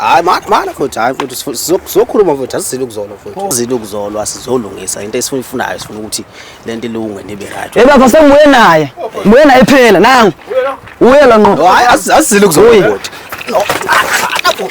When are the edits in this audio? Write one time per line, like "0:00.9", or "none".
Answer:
0:03.5